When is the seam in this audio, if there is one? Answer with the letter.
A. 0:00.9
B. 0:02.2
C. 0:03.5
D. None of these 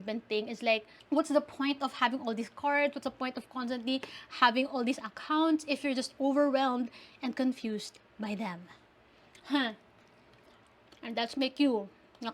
A